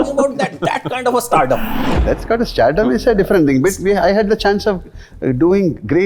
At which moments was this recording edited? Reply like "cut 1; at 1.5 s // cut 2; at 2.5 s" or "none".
none